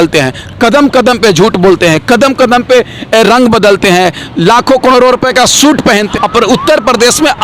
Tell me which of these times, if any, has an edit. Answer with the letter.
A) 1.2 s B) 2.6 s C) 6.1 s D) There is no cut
C